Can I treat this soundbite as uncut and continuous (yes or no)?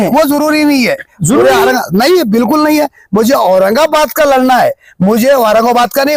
yes